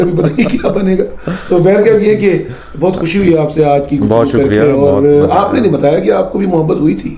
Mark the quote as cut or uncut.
uncut